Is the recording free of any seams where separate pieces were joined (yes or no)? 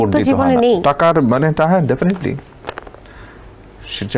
yes